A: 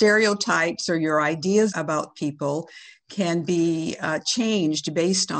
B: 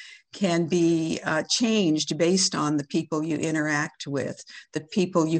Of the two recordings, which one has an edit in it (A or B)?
A